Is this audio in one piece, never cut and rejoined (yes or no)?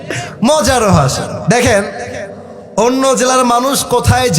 no